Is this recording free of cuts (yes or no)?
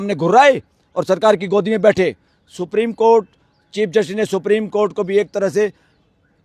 yes